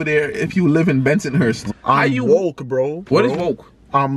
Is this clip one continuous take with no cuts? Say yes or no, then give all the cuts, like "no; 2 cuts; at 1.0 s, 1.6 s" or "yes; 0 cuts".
no; 2 cuts; at 1.7 s, 3.0 s